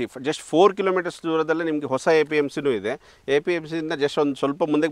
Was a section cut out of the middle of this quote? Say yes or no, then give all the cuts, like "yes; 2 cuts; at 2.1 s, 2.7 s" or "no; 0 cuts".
no; 0 cuts